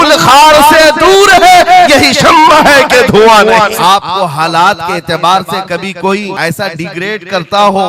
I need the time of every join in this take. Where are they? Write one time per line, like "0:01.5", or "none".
0:03.7
0:06.3